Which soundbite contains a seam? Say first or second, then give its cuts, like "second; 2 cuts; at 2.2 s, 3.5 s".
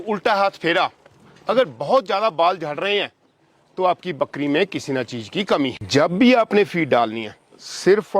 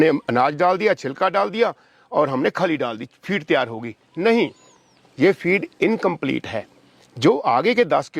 first; 1 cut; at 5.8 s